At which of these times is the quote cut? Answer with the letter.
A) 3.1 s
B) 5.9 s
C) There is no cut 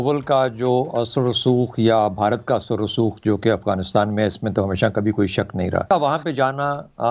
B